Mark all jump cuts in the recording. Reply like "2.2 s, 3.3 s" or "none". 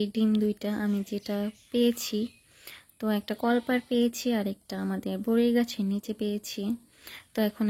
none